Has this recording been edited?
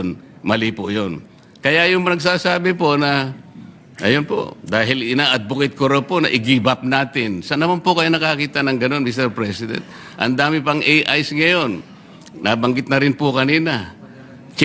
no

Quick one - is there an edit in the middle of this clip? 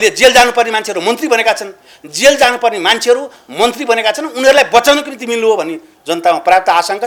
no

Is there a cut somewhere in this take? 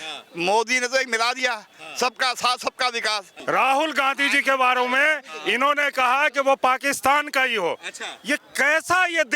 yes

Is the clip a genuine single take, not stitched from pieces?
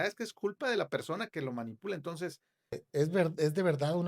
no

